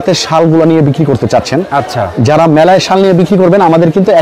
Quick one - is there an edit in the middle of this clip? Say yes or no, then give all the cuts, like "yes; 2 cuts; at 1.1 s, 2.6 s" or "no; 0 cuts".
no; 0 cuts